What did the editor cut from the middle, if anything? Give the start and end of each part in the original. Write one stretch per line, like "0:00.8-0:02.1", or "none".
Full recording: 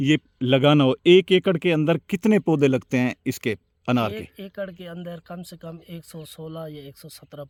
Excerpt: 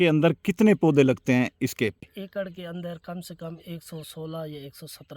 0:03.7-0:04.3